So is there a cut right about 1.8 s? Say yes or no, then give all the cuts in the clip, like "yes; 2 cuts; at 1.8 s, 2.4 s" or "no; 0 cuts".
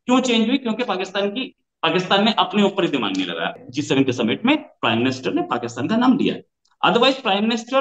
no; 1 cut; at 3.5 s